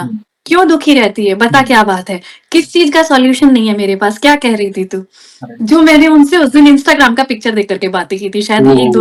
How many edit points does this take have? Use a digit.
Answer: 0